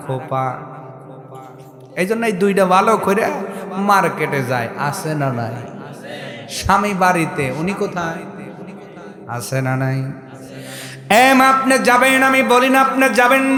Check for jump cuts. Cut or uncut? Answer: uncut